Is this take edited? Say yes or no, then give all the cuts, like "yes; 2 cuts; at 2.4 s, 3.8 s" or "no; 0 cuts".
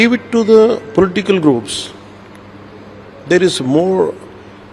no; 0 cuts